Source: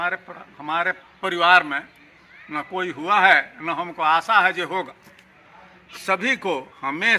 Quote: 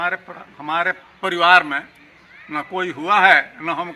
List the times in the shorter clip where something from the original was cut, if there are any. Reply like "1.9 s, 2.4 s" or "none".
none